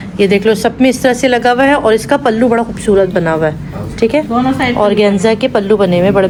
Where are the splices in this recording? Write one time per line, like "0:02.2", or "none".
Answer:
none